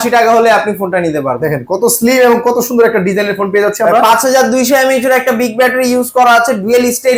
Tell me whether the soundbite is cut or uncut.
uncut